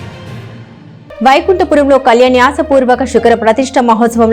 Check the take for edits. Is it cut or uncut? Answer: cut